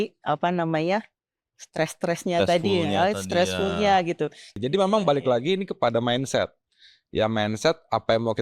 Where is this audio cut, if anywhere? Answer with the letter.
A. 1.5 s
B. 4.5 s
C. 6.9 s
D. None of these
B